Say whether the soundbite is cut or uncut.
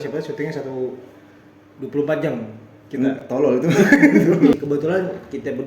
cut